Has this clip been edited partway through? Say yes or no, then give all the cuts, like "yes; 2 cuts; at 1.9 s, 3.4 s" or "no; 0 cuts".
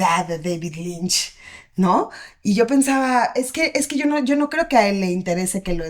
no; 0 cuts